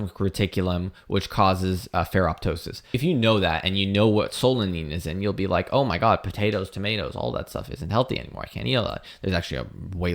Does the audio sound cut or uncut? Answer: cut